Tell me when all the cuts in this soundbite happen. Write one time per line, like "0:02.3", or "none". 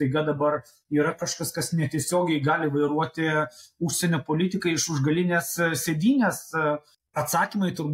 0:07.0